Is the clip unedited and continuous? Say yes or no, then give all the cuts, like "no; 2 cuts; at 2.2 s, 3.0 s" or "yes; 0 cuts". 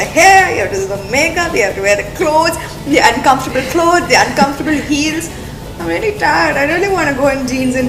yes; 0 cuts